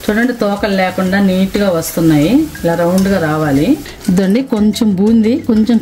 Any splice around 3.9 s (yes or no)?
yes